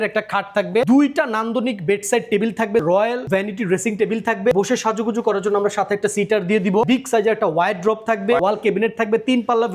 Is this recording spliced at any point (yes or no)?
yes